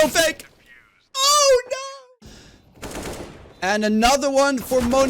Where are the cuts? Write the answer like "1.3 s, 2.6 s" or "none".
2.1 s